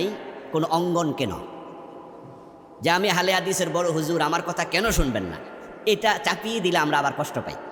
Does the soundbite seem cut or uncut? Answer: uncut